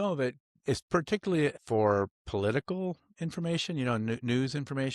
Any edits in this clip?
yes; 1 cut; at 1.5 s

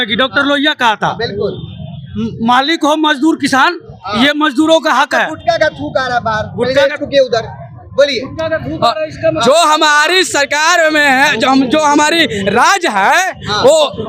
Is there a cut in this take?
no; 0 cuts

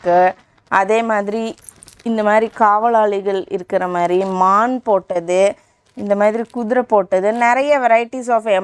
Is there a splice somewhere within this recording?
no; 0 cuts

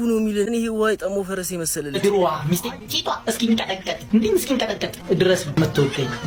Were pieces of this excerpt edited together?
no; 0 cuts

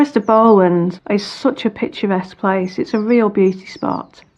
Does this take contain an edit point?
yes; 1 cut; at 1.0 s

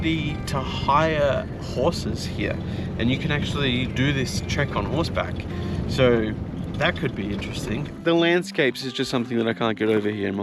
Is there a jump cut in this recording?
yes; 1 cut; at 7.9 s

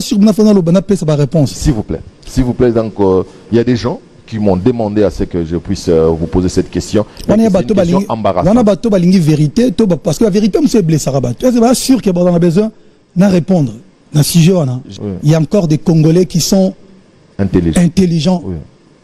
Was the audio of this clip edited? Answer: yes; 1 cut; at 14.9 s

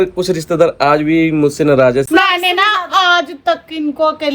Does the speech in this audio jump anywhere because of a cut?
yes; 1 cut; at 2.1 s

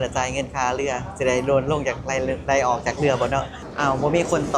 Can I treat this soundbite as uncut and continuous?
no; 1 cut; at 3.6 s

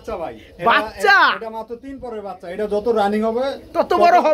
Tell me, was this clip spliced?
no; 0 cuts

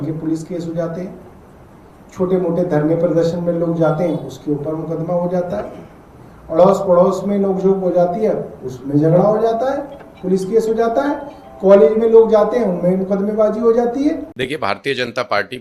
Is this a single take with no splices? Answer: no; 1 cut; at 14.3 s

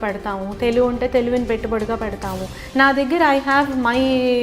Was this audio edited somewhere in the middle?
yes; 1 cut; at 2.5 s

